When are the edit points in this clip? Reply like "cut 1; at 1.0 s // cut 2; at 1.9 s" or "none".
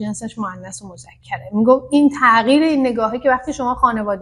none

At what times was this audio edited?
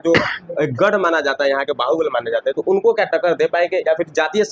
none

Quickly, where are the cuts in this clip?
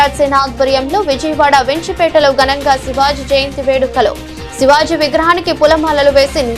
none

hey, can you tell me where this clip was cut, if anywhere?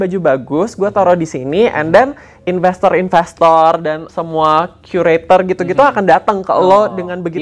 none

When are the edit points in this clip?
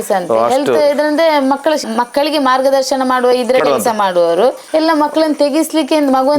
cut 1; at 1.9 s // cut 2; at 4.6 s

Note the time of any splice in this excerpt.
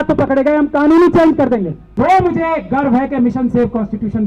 cut 1; at 1.8 s

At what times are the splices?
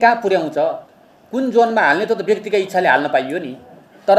none

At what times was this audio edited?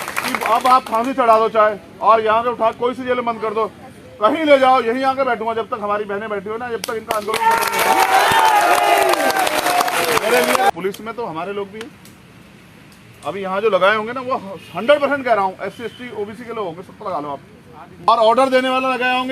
cut 1; at 10.7 s // cut 2; at 18.1 s

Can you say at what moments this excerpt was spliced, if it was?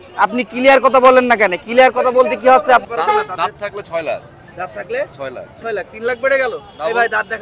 cut 1; at 2.9 s

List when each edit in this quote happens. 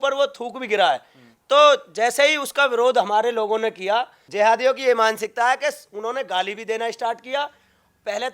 cut 1; at 4.2 s

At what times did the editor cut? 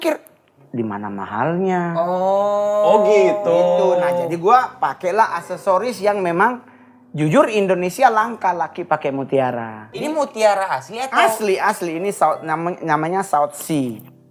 none

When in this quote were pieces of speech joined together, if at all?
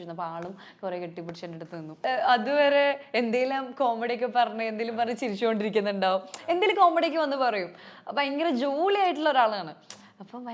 cut 1; at 2.0 s

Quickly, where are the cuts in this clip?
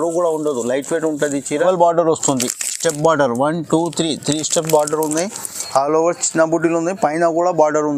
cut 1; at 1.6 s

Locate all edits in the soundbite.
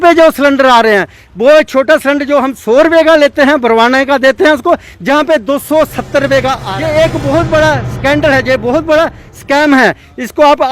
cut 1; at 6.7 s

